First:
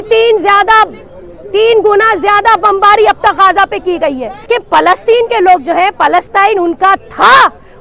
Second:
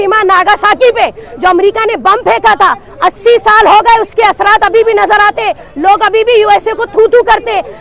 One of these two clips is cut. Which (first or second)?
first